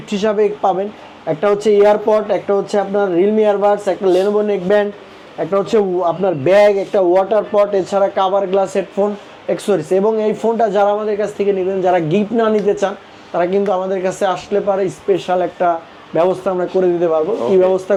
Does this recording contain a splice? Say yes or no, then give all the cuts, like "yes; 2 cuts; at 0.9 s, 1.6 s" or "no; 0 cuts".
no; 0 cuts